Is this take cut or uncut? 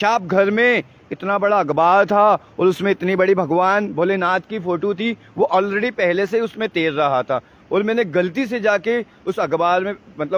uncut